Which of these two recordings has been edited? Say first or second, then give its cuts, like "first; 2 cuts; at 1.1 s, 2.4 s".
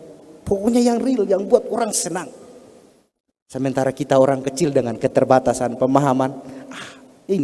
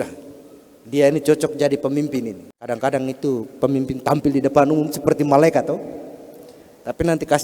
second; 1 cut; at 2.5 s